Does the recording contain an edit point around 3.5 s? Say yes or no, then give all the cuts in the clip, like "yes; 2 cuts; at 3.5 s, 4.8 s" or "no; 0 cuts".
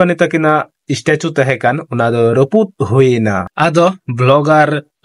yes; 1 cut; at 3.5 s